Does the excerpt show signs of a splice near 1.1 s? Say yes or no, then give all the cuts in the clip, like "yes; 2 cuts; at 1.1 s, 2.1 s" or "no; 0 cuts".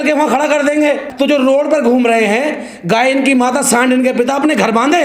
yes; 1 cut; at 1.1 s